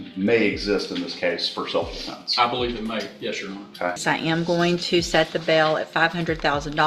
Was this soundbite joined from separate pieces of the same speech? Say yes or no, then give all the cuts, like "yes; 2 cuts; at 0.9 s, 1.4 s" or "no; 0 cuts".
yes; 1 cut; at 4.0 s